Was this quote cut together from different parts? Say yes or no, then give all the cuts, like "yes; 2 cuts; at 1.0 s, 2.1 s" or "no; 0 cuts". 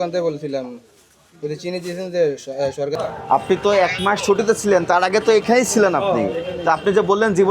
yes; 1 cut; at 2.9 s